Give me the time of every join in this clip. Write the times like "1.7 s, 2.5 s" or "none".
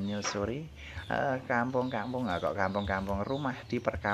none